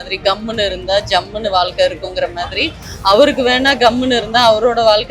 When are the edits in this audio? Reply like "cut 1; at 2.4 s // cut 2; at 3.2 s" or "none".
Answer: none